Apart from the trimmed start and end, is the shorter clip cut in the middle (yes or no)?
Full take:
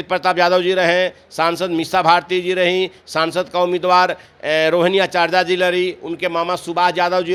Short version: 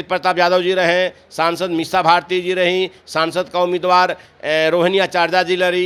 no